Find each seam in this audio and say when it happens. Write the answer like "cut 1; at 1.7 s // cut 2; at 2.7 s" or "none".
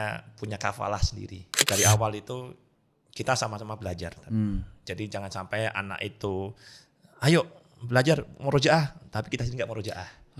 cut 1; at 1.5 s

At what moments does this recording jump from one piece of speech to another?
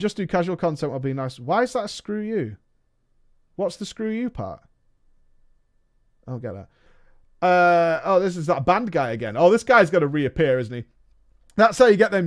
cut 1; at 6.8 s

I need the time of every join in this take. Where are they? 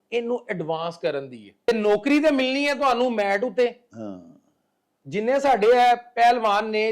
cut 1; at 1.7 s

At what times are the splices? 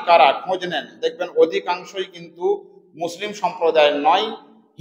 none

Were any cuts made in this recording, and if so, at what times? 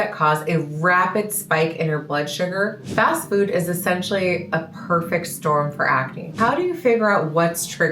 cut 1; at 2.8 s // cut 2; at 6.4 s

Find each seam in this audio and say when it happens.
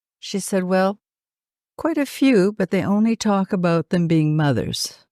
none

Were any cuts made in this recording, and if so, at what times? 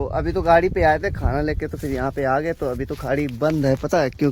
none

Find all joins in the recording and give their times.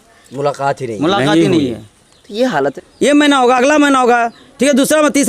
cut 1; at 2.6 s

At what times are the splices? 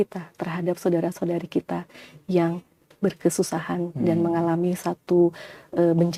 none

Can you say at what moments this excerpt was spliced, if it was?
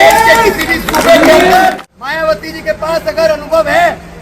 cut 1; at 1.8 s

